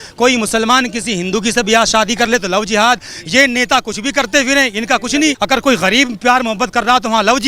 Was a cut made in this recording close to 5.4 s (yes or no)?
yes